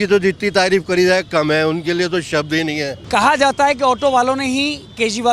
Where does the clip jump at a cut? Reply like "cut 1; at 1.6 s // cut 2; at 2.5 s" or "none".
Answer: cut 1; at 3.0 s